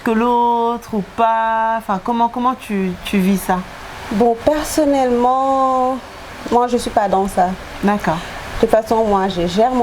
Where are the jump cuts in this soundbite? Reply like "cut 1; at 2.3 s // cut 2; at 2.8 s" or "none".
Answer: cut 1; at 8.0 s